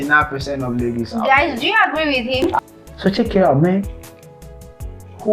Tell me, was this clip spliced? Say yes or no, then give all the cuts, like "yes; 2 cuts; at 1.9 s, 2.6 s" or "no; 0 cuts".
yes; 1 cut; at 2.6 s